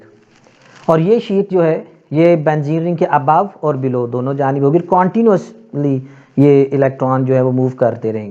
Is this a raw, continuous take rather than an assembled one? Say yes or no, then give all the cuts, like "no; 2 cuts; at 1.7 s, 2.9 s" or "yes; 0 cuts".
yes; 0 cuts